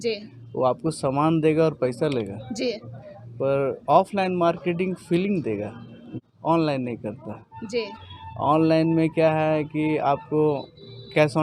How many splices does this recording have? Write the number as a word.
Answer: one